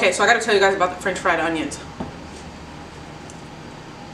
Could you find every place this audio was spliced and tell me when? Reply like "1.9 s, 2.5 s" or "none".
none